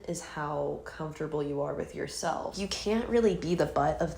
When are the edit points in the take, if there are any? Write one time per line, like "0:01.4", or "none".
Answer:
0:02.5

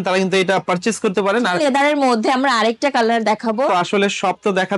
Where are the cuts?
0:01.6
0:03.7

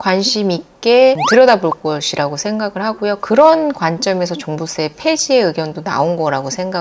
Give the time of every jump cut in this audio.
none

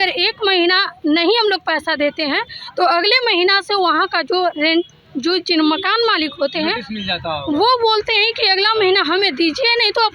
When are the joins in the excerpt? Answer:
none

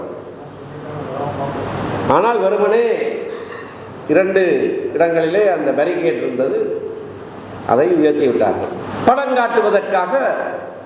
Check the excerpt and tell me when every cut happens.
0:08.8

